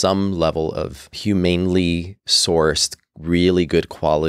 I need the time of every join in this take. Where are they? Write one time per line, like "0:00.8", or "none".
0:01.0